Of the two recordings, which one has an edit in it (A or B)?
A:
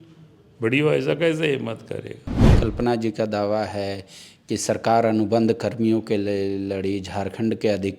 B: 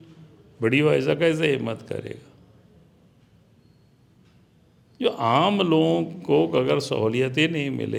A